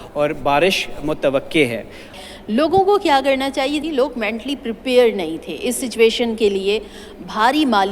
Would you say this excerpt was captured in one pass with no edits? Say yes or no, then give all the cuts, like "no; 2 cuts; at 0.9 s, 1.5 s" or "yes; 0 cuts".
no; 2 cuts; at 2.2 s, 3.8 s